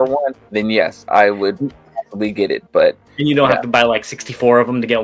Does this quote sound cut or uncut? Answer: uncut